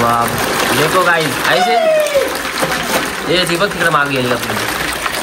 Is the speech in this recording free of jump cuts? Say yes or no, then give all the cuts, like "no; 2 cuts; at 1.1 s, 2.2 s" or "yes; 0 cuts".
yes; 0 cuts